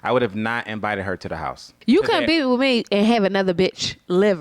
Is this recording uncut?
no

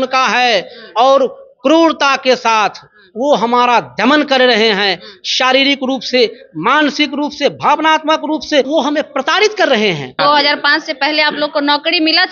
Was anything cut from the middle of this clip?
yes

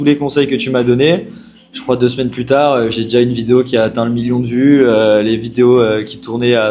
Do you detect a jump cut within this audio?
no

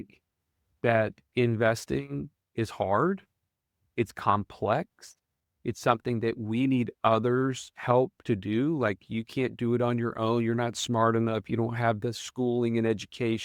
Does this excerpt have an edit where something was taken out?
no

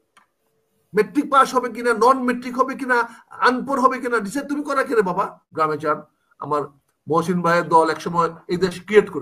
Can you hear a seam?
yes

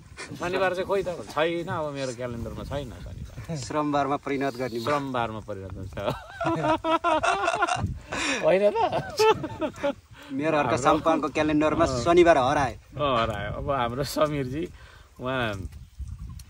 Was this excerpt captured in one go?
yes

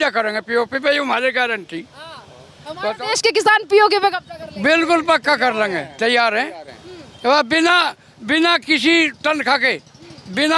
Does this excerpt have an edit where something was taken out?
no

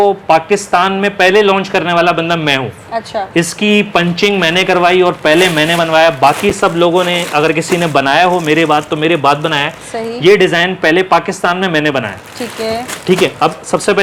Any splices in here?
no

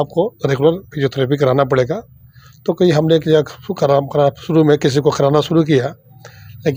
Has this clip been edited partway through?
no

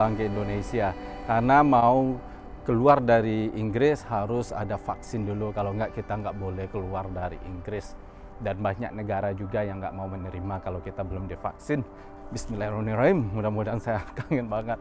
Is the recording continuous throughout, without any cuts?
yes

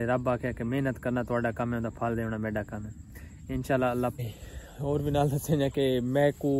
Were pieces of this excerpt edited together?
yes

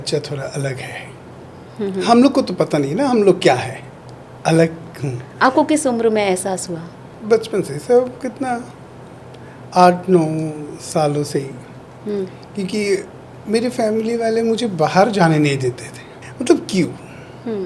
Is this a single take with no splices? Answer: yes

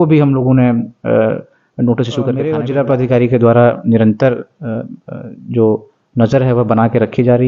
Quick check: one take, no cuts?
no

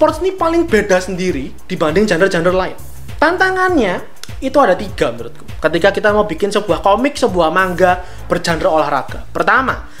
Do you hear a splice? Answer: no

